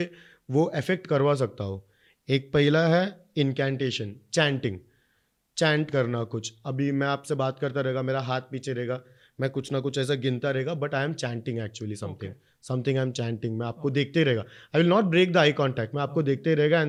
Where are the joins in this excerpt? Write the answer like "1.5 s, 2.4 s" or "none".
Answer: none